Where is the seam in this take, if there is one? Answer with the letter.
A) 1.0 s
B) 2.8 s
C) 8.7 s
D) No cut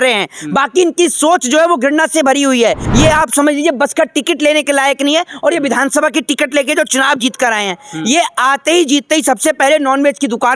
B